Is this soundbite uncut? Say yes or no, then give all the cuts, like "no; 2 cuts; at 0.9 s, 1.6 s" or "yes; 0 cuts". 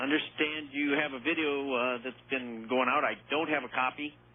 yes; 0 cuts